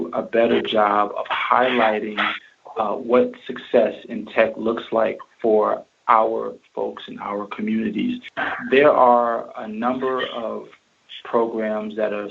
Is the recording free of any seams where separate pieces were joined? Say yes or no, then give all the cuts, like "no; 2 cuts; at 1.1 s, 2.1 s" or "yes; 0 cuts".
no; 1 cut; at 8.3 s